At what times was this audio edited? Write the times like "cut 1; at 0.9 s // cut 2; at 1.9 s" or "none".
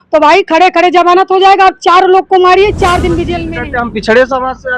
cut 1; at 3.4 s